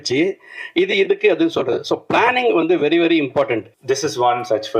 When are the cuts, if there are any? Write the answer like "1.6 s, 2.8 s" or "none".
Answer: 3.7 s